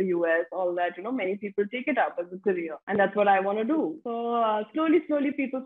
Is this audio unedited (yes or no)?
yes